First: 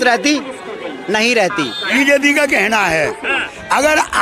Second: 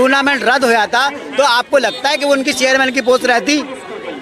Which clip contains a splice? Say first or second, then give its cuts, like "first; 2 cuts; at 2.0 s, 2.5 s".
first; 1 cut; at 1.9 s